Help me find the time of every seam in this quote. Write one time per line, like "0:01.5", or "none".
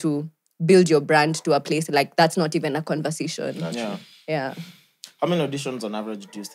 none